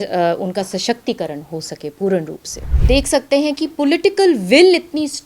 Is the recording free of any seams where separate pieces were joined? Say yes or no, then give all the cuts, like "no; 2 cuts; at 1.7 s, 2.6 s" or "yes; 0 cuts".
no; 1 cut; at 2.7 s